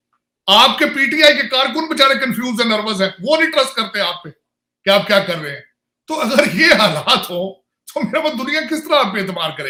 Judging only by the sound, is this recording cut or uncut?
uncut